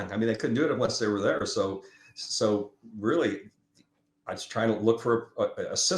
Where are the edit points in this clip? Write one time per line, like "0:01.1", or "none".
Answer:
none